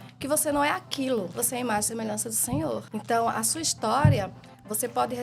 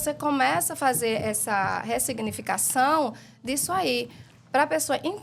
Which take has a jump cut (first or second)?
first